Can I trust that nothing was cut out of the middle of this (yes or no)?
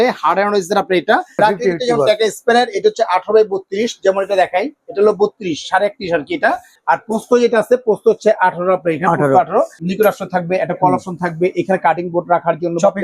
no